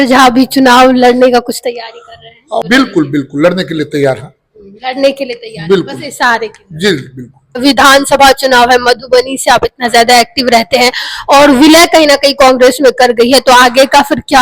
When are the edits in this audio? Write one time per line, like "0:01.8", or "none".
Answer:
0:02.6
0:07.6